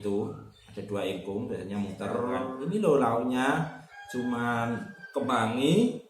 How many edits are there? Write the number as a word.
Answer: one